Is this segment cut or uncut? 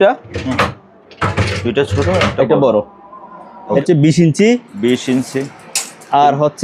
cut